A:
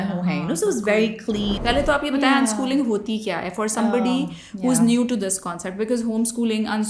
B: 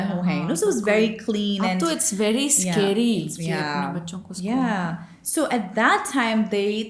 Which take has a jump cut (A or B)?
A